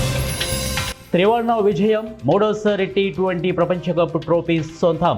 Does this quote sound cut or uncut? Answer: cut